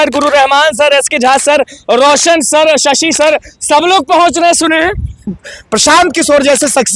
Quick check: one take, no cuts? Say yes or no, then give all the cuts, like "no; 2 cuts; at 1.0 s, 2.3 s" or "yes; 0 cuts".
no; 1 cut; at 5.4 s